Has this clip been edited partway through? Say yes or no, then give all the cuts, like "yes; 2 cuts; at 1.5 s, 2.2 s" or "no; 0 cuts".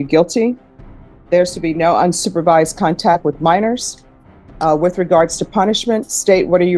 no; 0 cuts